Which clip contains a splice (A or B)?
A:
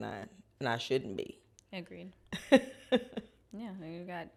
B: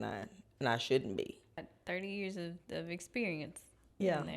B